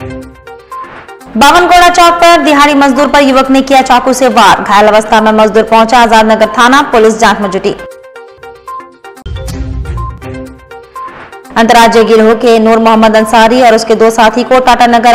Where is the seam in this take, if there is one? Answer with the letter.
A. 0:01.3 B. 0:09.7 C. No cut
C